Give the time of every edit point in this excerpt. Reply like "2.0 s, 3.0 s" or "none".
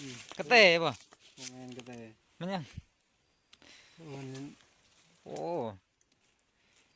none